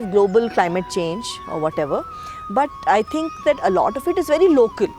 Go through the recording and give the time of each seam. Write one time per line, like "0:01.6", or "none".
none